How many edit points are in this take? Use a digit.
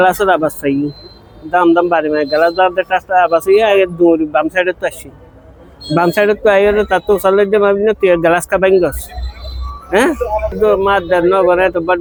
0